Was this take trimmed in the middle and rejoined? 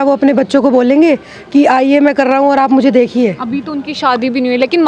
no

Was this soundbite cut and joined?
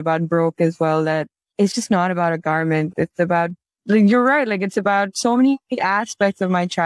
no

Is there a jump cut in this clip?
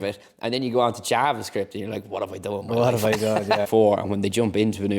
yes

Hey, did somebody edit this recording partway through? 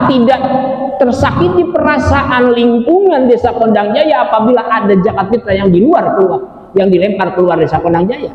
no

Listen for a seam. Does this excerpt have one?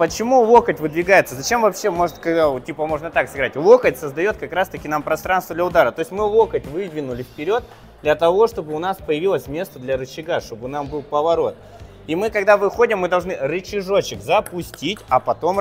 no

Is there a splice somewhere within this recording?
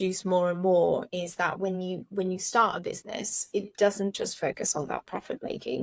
no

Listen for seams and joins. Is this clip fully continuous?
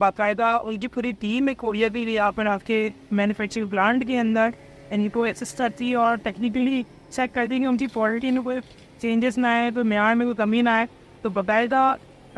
yes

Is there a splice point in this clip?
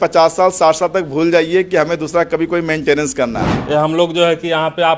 yes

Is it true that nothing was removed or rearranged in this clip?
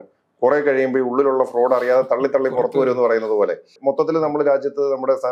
no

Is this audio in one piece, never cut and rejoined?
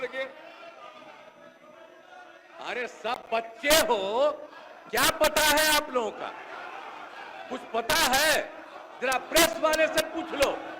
yes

